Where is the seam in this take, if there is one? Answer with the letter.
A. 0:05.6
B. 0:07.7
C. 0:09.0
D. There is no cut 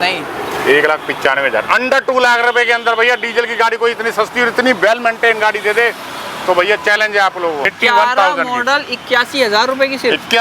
B